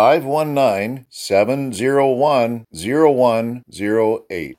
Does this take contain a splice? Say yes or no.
no